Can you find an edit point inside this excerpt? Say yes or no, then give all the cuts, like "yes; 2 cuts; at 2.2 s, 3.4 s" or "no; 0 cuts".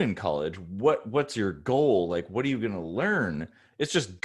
no; 0 cuts